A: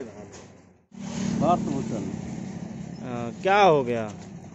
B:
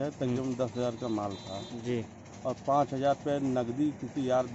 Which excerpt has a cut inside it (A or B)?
A